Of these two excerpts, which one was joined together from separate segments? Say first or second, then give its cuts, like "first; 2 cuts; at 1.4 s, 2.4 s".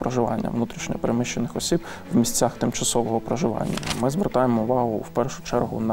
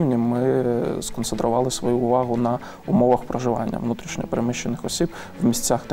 first; 1 cut; at 3.8 s